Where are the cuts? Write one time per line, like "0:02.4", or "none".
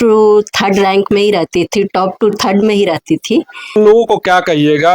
0:03.8